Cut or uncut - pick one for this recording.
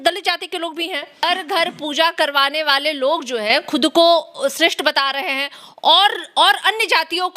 cut